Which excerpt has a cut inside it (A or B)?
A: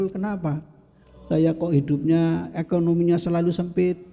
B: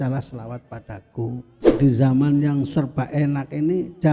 B